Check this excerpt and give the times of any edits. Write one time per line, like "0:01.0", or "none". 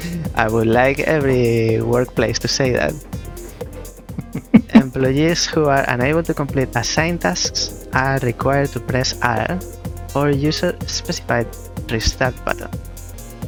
none